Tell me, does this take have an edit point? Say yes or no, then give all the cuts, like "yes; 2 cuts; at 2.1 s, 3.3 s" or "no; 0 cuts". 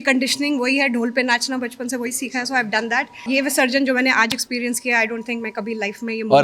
yes; 1 cut; at 3.2 s